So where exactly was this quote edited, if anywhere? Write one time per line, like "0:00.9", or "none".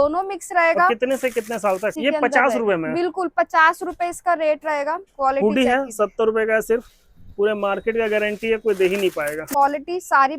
0:01.9
0:05.1
0:09.5